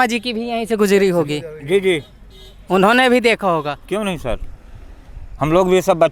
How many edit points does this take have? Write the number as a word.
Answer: zero